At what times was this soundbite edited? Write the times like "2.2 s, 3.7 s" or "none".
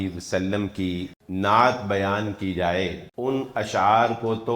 1.2 s, 3.0 s